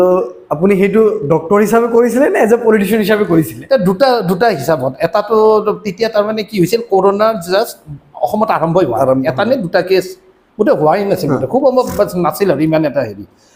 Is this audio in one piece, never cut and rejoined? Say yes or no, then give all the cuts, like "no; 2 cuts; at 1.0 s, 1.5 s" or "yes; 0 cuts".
yes; 0 cuts